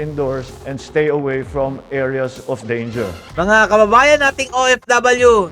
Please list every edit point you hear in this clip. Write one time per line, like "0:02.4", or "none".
0:03.3